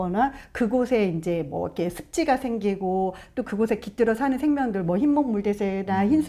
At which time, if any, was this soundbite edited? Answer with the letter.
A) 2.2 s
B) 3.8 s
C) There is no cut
C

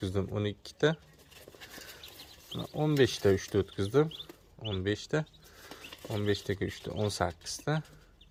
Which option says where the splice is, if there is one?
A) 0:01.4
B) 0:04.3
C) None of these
C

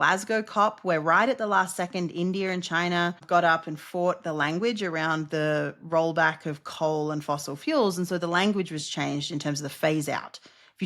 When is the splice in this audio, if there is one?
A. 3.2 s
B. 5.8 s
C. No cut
A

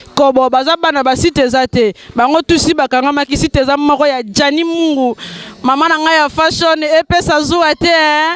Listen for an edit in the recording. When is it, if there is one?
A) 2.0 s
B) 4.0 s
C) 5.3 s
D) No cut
D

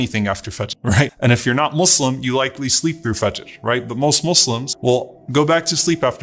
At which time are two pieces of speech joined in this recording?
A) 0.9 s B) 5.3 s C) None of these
A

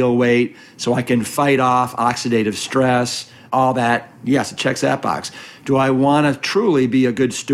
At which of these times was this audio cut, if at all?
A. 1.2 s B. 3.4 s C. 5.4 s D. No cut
B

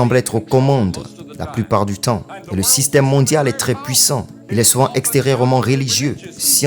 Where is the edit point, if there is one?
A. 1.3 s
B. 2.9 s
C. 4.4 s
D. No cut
C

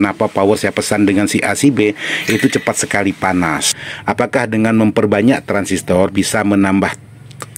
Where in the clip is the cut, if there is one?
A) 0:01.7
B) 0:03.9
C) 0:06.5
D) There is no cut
B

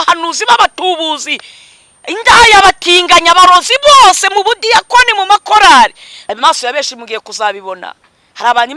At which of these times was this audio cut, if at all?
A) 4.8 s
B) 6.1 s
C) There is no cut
B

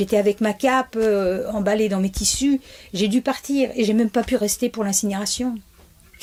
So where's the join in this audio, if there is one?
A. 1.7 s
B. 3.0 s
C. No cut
C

